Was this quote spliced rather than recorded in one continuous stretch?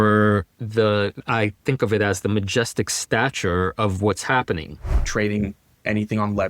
yes; 2 cuts; at 1.2 s, 5.0 s

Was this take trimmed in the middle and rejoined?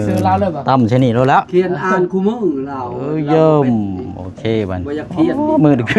no; 0 cuts

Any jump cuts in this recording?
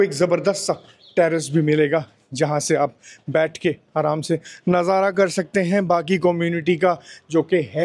no; 0 cuts

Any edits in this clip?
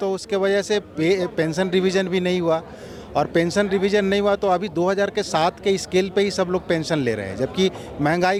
no; 0 cuts

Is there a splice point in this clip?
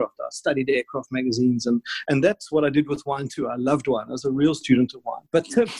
no; 0 cuts

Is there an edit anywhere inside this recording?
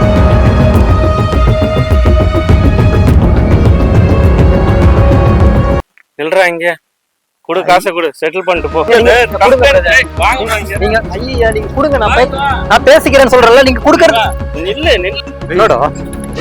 yes; 1 cut; at 8.9 s

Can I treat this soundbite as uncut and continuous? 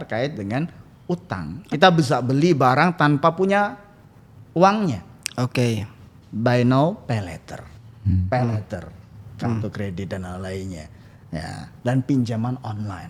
yes; 0 cuts

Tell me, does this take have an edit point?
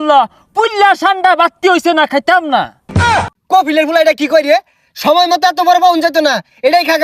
yes; 1 cut; at 3.0 s

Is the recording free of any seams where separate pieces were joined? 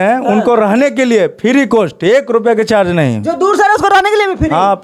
yes; 0 cuts

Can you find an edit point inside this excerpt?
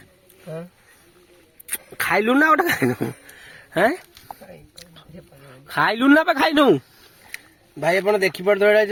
no; 0 cuts

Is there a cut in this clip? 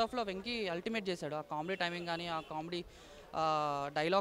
no; 0 cuts

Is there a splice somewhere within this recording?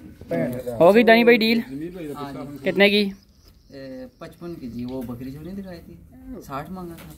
no; 0 cuts

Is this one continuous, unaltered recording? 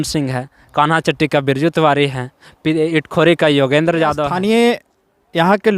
no; 1 cut; at 4.3 s

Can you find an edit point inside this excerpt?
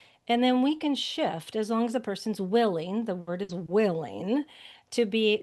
no; 0 cuts

